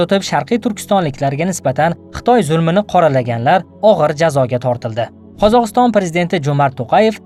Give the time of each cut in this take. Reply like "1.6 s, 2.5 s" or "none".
none